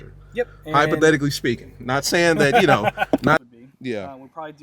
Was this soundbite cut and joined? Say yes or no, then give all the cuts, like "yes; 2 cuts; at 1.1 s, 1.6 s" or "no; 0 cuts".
yes; 1 cut; at 3.4 s